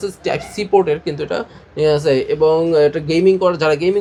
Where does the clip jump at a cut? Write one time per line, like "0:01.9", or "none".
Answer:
none